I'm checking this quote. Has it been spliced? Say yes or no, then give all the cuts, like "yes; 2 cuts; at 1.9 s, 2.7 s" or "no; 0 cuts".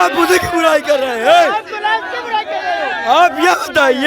no; 0 cuts